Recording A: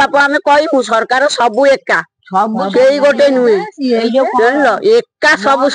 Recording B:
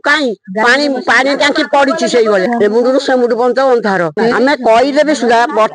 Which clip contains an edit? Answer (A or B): B